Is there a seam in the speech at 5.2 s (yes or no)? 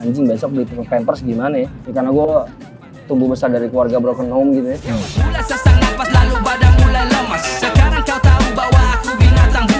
yes